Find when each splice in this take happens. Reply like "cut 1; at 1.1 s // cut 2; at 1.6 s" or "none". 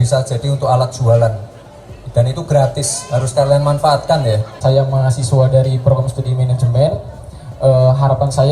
cut 1; at 4.5 s